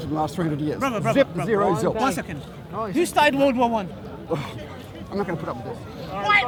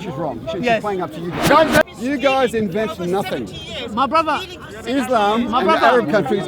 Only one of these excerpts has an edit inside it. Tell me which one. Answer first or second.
second